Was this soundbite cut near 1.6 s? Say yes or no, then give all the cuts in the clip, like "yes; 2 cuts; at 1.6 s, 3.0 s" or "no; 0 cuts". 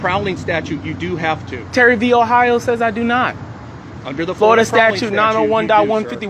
no; 0 cuts